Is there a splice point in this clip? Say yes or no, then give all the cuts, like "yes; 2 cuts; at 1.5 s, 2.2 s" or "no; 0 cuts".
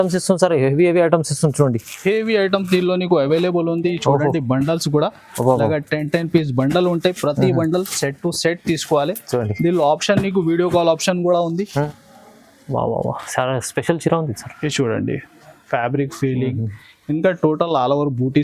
yes; 1 cut; at 11.9 s